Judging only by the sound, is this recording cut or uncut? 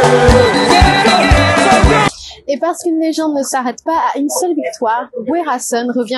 uncut